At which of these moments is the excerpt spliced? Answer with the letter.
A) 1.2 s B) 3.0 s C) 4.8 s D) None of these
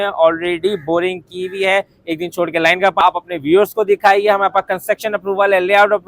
B